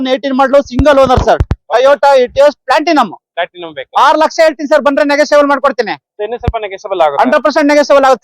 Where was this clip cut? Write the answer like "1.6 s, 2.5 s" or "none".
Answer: none

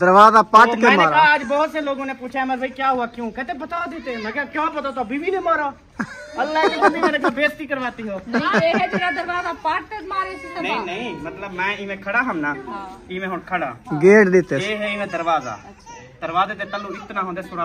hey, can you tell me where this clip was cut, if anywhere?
none

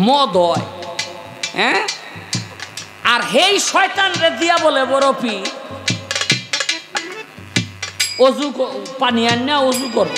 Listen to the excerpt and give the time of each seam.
none

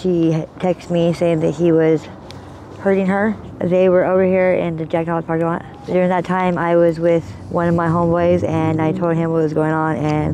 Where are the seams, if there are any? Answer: 3.4 s, 5.8 s, 7.4 s

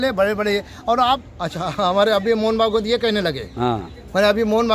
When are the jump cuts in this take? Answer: 1.2 s

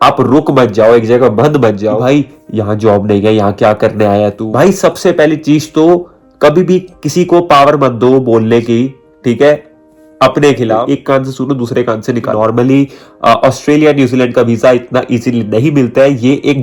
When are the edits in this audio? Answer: 2.0 s, 4.4 s, 10.8 s, 12.3 s

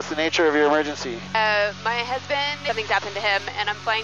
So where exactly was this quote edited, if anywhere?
1.1 s, 2.6 s

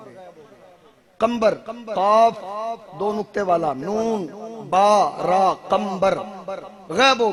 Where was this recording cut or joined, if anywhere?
none

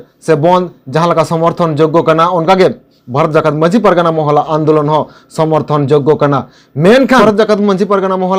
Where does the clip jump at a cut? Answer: 7.2 s

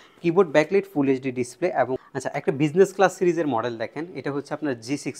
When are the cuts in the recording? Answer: 2.0 s

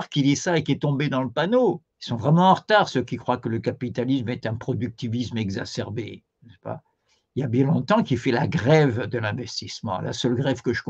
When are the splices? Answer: 1.9 s

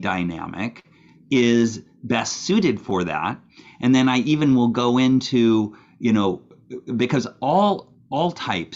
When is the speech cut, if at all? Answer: none

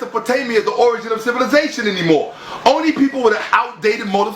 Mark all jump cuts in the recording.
none

